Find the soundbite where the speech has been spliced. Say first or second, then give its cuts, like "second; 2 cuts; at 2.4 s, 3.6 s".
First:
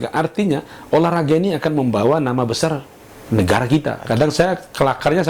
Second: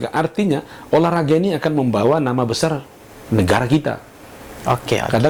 first; 1 cut; at 4.0 s